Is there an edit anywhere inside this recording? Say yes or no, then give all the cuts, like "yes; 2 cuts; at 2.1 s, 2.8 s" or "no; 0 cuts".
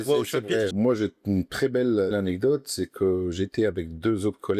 yes; 2 cuts; at 0.7 s, 2.1 s